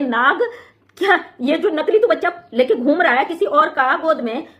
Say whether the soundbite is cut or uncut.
uncut